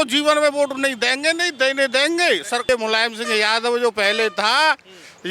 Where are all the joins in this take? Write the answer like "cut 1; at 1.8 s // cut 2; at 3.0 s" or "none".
cut 1; at 2.7 s

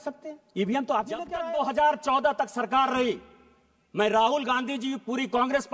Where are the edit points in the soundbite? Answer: cut 1; at 1.3 s

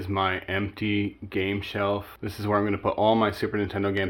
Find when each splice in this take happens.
none

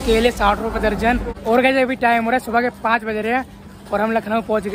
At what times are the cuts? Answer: cut 1; at 1.4 s

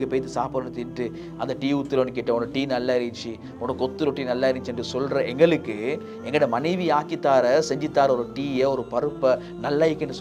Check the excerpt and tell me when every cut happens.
none

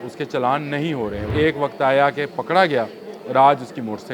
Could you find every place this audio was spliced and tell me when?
cut 1; at 1.3 s

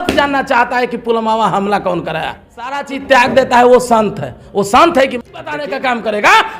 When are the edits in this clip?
cut 1; at 2.8 s // cut 2; at 5.7 s

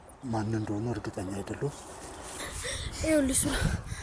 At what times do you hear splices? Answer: cut 1; at 2.4 s

